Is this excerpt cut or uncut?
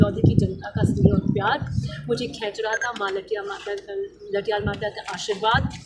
uncut